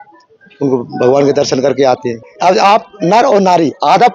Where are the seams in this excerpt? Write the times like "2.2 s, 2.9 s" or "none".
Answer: 2.3 s